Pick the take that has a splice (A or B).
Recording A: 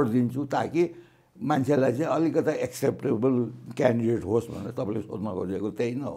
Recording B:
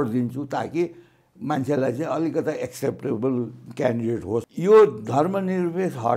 B